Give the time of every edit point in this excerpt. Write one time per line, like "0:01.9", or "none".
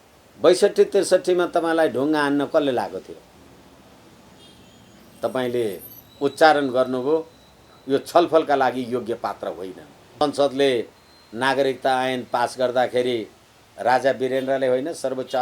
0:03.4
0:10.2